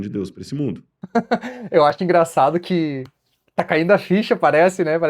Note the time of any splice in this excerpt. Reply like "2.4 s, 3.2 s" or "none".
0.9 s